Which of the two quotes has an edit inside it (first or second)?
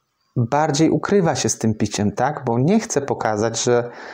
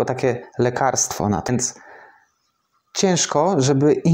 second